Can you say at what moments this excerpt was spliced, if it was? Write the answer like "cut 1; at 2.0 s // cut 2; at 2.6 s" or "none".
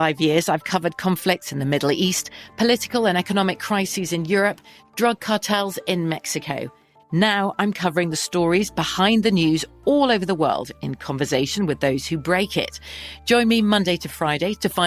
none